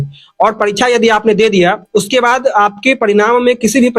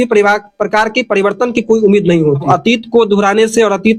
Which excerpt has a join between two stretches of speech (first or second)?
second